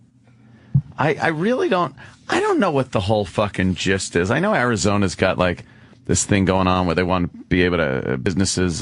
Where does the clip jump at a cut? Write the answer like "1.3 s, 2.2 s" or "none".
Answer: 5.3 s